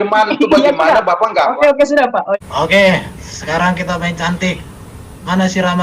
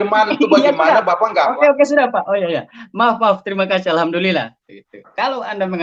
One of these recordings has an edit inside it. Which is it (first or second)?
first